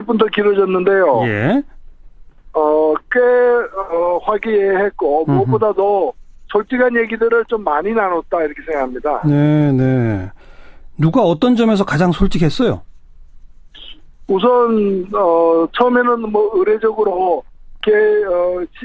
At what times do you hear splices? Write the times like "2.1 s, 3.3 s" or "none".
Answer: none